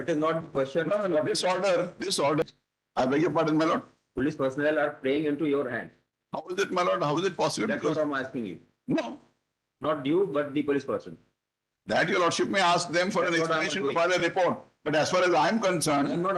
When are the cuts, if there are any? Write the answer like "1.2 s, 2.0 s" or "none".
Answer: 2.4 s